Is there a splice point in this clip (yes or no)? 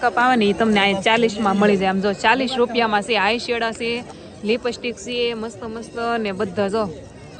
no